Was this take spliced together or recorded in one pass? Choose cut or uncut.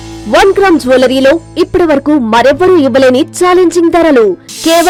uncut